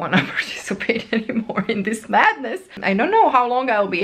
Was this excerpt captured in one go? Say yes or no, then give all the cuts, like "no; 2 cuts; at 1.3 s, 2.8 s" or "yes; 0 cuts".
no; 1 cut; at 2.8 s